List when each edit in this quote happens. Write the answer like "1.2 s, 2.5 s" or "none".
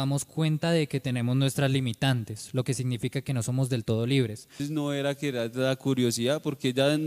4.5 s